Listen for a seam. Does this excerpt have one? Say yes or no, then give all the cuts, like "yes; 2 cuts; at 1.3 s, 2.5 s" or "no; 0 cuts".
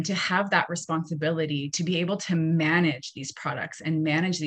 no; 0 cuts